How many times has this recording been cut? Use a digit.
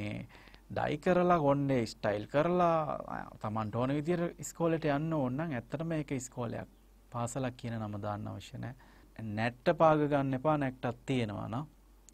1